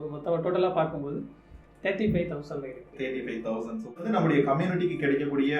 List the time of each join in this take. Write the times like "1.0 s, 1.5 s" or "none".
4.0 s